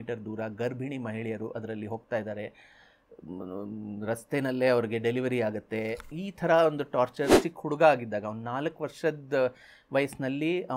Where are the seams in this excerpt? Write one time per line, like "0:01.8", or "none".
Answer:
0:07.4